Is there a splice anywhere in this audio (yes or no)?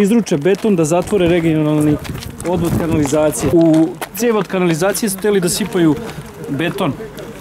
yes